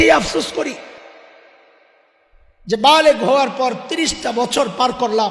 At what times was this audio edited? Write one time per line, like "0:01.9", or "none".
0:01.0